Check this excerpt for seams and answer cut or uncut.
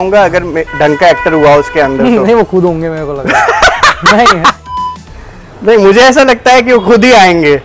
uncut